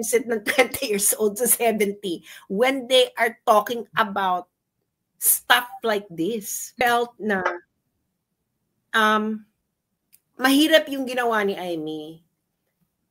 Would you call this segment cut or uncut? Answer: cut